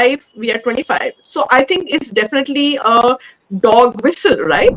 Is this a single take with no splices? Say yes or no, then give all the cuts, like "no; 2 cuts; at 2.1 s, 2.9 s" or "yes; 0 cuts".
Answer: yes; 0 cuts